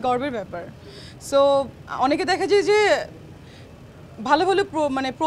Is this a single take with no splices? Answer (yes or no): yes